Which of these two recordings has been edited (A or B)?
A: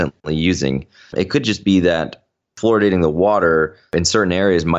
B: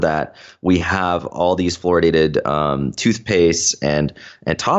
A